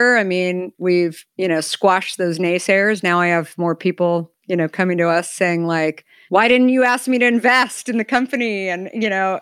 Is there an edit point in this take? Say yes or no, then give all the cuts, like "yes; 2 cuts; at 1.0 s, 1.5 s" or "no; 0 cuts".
yes; 2 cuts; at 1.2 s, 6.1 s